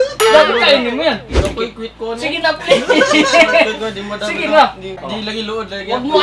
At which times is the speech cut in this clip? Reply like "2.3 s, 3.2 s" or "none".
1.3 s, 4.9 s